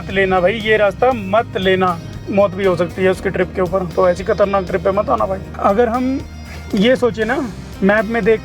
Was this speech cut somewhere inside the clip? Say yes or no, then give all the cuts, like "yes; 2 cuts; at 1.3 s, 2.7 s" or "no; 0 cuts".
yes; 2 cuts; at 2.2 s, 5.5 s